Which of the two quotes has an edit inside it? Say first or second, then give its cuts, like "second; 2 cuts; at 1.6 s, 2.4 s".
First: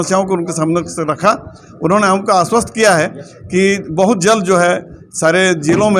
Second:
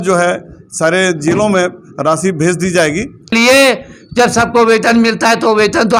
second; 1 cut; at 3.3 s